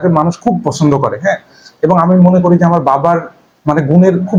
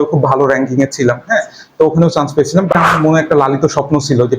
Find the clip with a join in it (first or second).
second